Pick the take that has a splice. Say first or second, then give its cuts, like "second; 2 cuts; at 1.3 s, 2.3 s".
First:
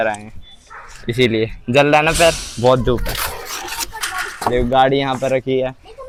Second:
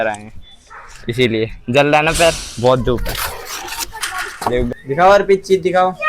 second; 1 cut; at 4.7 s